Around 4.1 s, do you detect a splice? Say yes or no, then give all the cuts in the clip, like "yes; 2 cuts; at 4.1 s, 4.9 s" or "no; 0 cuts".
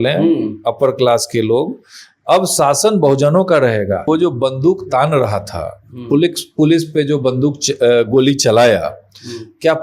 yes; 1 cut; at 4.1 s